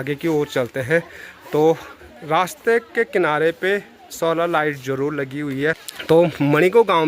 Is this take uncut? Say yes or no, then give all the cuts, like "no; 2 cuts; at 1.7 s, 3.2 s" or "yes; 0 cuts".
no; 1 cut; at 5.9 s